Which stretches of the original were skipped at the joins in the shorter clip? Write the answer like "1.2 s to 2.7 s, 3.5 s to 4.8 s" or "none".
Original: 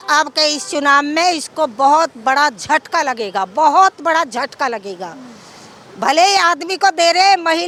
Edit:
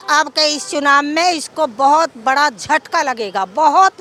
none